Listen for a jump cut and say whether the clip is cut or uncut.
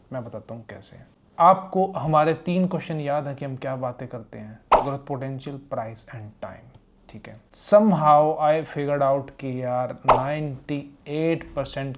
uncut